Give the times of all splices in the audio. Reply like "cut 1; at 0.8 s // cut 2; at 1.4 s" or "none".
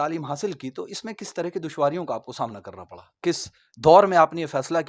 cut 1; at 3.3 s